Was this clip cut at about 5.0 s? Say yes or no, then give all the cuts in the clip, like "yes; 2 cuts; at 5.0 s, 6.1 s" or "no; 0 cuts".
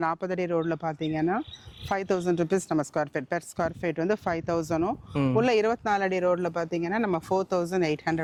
no; 0 cuts